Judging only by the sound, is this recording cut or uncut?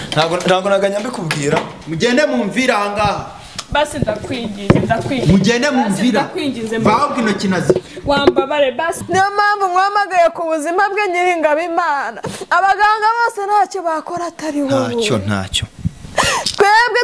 cut